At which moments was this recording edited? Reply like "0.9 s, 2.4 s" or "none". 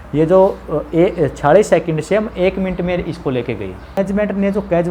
4.0 s